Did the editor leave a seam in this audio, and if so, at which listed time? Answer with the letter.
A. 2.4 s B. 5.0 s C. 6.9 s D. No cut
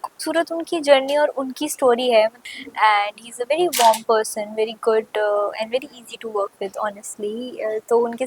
A